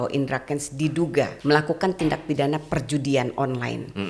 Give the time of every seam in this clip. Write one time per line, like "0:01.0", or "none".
0:01.4

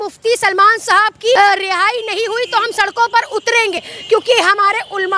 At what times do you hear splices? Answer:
0:01.4
0:03.7

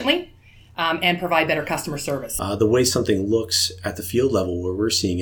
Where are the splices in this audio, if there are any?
0:02.3

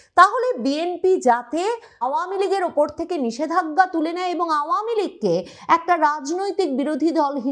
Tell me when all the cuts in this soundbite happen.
0:02.1

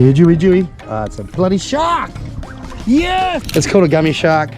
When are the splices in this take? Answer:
0:03.4

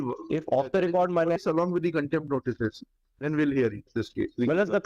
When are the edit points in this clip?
0:01.4

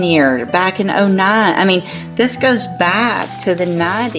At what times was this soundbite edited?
none

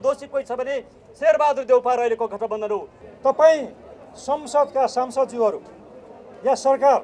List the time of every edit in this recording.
0:03.0

